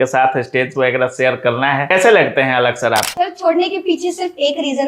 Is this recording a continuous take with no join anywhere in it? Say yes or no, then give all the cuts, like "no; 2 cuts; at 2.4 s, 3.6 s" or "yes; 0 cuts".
no; 2 cuts; at 1.9 s, 3.1 s